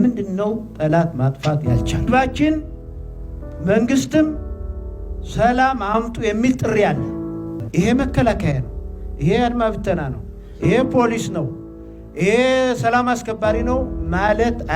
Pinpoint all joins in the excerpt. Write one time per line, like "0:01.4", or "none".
0:02.0
0:07.6